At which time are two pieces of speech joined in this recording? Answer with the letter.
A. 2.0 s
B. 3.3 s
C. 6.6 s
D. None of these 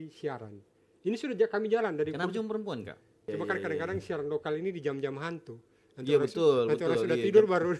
B